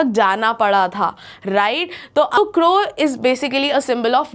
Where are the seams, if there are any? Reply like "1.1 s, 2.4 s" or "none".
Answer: 2.4 s